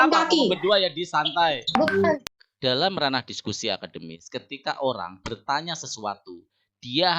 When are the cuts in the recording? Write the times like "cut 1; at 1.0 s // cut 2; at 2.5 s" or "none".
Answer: cut 1; at 2.1 s

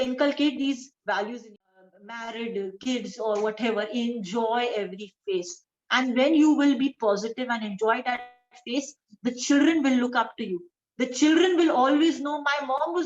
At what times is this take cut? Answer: cut 1; at 1.6 s

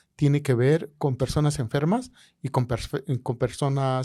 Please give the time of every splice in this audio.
none

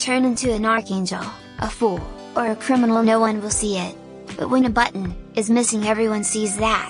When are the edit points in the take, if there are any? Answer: none

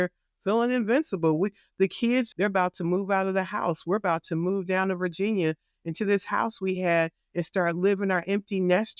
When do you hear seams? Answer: cut 1; at 2.3 s

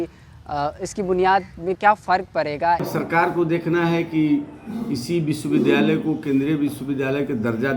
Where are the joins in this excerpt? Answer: cut 1; at 2.9 s

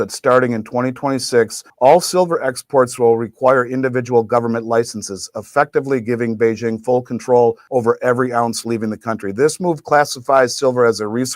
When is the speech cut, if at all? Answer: cut 1; at 1.6 s // cut 2; at 7.6 s

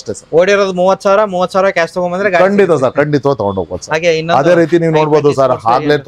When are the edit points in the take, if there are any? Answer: none

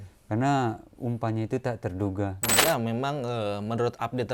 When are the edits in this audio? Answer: cut 1; at 2.5 s

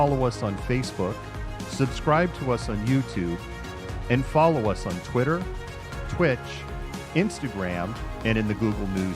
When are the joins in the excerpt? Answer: cut 1; at 5.8 s

